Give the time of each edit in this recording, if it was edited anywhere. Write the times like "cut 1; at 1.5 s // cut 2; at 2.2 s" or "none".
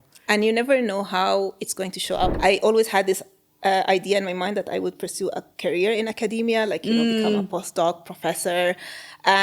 cut 1; at 2.3 s